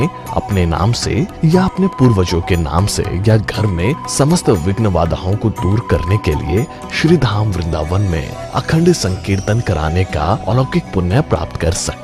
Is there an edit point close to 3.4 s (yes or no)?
no